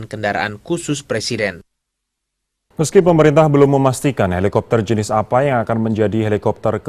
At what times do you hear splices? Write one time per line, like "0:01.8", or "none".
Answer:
0:04.3